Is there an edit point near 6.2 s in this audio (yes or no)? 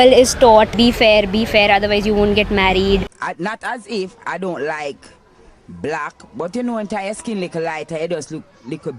no